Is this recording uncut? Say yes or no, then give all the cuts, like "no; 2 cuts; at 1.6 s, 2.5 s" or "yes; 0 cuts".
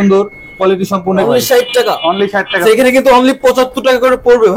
no; 2 cuts; at 1.2 s, 2.6 s